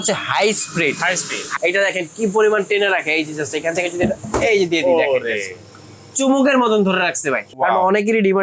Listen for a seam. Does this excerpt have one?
yes; 2 cuts; at 1.5 s, 7.4 s

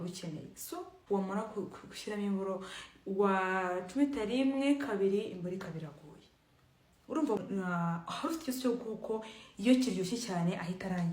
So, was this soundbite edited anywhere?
yes; 2 cuts; at 0.9 s, 7.4 s

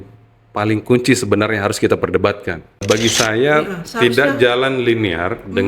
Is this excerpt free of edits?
no; 1 cut; at 2.8 s

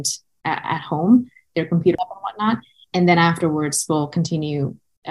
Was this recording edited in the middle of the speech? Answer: yes; 1 cut; at 1.7 s

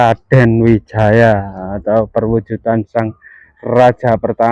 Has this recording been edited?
no; 0 cuts

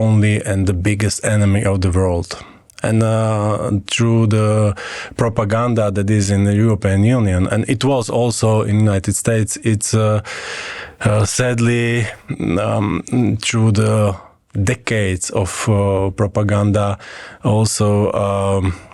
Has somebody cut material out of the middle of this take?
no; 0 cuts

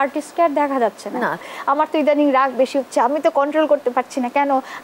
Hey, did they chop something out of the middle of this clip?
yes; 1 cut; at 1.5 s

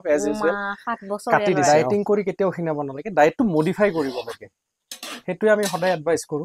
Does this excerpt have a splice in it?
yes; 1 cut; at 1.7 s

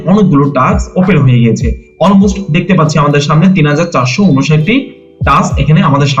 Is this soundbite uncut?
yes; 0 cuts

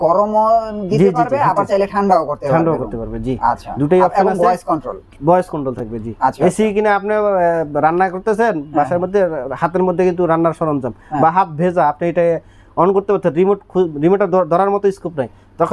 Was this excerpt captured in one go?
yes; 0 cuts

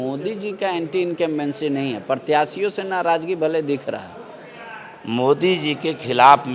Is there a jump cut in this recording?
no; 0 cuts

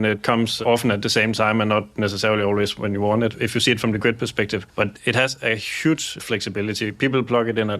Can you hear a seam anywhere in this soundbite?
yes; 1 cut; at 3.4 s

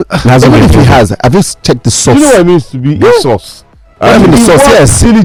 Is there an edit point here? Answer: no; 0 cuts

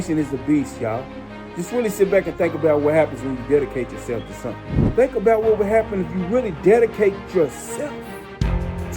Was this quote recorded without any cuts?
no; 1 cut; at 4.8 s

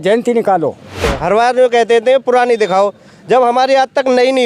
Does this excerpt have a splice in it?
yes; 1 cut; at 1.0 s

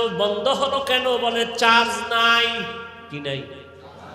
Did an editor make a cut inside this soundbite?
no; 0 cuts

